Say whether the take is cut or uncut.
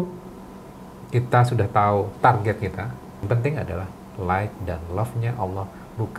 cut